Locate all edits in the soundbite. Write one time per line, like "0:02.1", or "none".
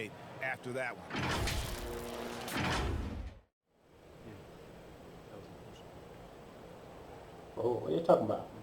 0:03.3